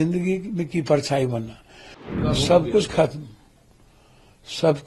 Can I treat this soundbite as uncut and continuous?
no; 1 cut; at 2.1 s

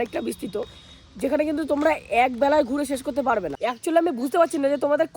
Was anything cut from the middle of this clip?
yes; 1 cut; at 3.5 s

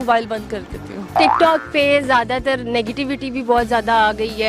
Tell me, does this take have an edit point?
yes; 1 cut; at 1.1 s

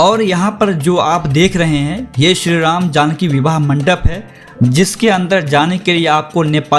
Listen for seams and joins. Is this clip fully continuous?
yes; 0 cuts

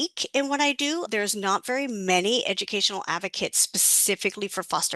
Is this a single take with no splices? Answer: no; 1 cut; at 1.1 s

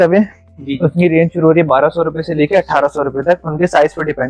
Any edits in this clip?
no; 0 cuts

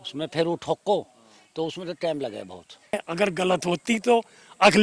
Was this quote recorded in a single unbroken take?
no; 1 cut; at 2.9 s

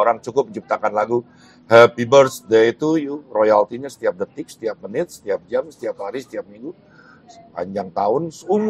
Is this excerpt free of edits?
yes; 0 cuts

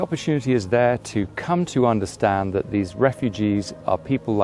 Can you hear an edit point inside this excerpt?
no; 0 cuts

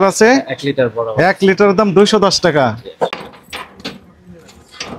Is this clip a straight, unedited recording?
no; 1 cut; at 3.2 s

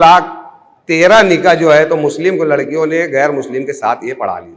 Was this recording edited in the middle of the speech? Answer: no; 0 cuts

